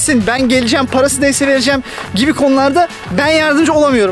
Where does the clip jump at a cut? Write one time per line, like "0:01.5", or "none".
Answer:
none